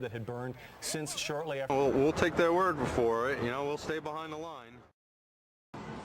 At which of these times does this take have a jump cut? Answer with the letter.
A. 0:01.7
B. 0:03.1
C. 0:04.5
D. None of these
A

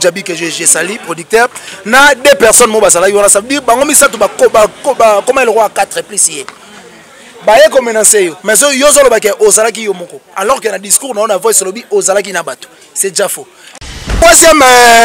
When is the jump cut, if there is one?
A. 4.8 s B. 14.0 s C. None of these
B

